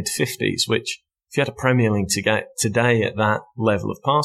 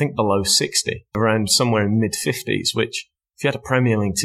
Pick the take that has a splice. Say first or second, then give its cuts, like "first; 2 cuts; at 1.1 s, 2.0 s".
second; 1 cut; at 1.2 s